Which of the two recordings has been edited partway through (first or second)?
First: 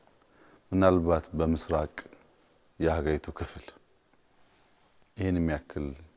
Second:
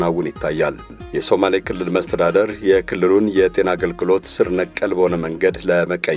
second